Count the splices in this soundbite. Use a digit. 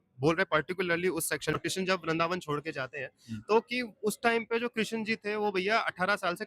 1